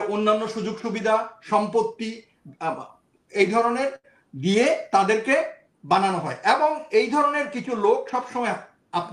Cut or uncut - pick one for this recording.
uncut